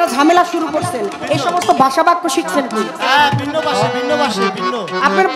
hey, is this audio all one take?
yes; 0 cuts

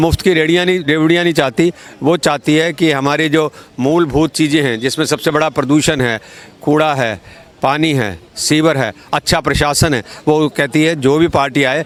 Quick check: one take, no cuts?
yes; 0 cuts

